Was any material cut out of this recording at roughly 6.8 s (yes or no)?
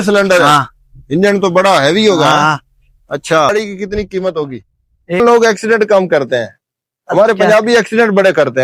no